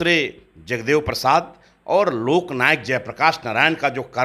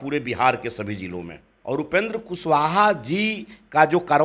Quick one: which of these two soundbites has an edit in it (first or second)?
second